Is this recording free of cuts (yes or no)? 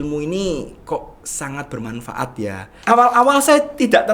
no